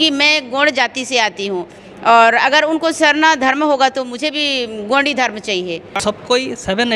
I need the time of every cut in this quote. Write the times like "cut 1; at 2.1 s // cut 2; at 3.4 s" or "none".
cut 1; at 5.9 s